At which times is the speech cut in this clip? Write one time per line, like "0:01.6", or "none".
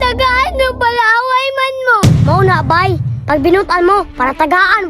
0:02.1